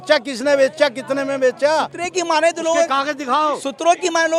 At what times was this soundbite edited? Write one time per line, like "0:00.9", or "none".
none